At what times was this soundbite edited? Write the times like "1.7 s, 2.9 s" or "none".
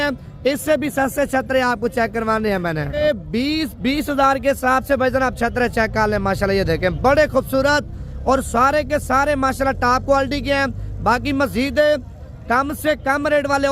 2.9 s